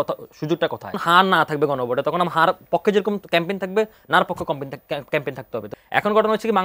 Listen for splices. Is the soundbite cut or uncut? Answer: cut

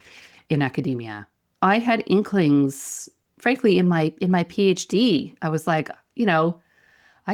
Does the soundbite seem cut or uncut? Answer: uncut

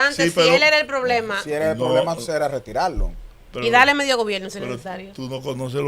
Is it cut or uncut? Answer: uncut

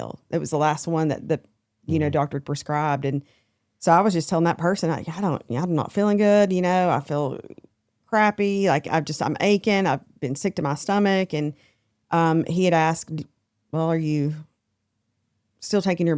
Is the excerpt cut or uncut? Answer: uncut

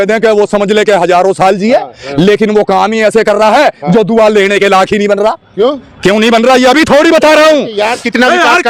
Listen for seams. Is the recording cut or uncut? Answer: uncut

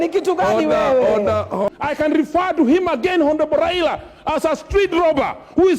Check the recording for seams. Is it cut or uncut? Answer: cut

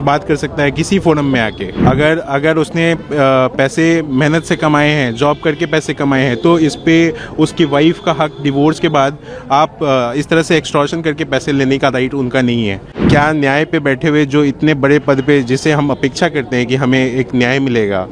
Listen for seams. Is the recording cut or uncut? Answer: cut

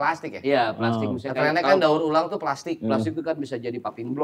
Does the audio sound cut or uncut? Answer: uncut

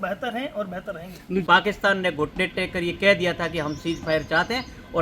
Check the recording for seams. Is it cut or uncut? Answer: cut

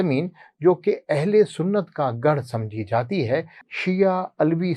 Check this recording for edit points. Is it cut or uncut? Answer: cut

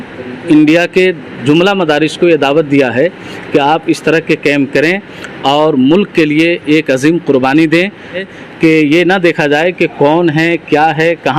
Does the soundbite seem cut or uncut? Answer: cut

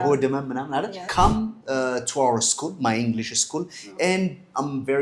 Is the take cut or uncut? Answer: cut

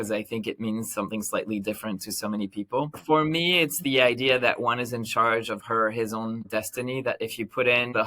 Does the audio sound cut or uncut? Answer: cut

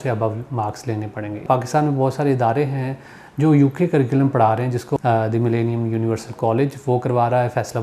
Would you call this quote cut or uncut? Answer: cut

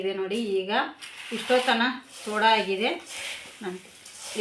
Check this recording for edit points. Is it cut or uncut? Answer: uncut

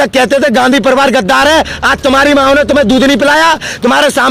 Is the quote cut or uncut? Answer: uncut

